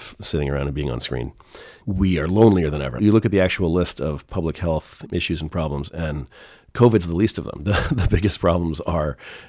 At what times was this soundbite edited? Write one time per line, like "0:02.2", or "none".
0:03.0
0:05.0